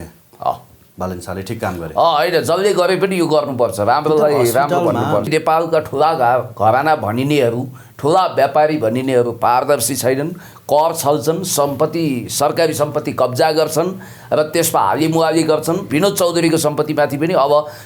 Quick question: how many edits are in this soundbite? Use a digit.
2